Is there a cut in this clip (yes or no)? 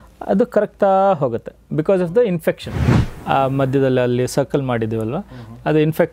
yes